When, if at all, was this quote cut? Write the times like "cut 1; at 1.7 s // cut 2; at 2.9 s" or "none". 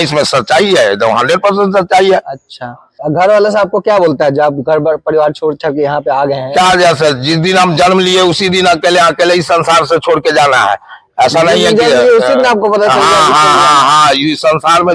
cut 1; at 3.0 s